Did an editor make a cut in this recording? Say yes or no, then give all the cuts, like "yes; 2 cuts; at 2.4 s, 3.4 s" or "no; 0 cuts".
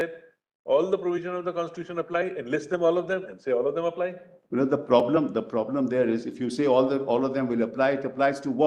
no; 0 cuts